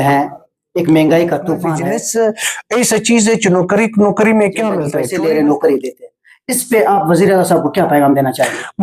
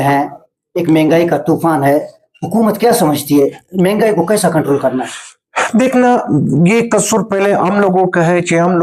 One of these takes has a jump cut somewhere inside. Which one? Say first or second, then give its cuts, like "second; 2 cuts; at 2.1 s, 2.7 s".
first; 2 cuts; at 1.7 s, 5.0 s